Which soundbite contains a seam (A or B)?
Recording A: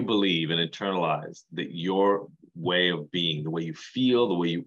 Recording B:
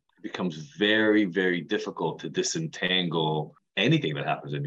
B